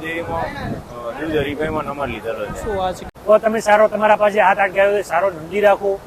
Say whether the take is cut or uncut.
cut